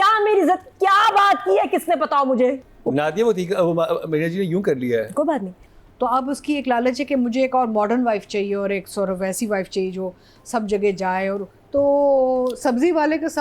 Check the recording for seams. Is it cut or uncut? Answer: cut